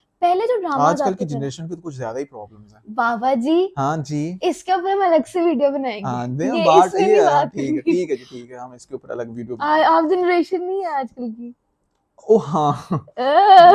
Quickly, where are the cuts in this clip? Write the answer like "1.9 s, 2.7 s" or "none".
none